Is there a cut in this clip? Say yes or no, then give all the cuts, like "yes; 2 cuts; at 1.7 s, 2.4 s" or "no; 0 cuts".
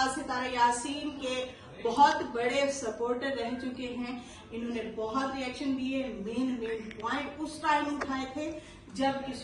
no; 0 cuts